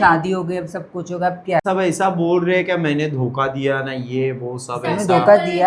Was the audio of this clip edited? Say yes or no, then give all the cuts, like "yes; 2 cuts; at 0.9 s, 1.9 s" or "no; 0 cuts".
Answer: yes; 1 cut; at 1.6 s